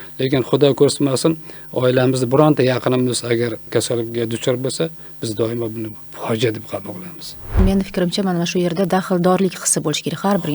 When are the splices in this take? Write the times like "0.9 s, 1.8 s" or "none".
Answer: 3.7 s, 7.6 s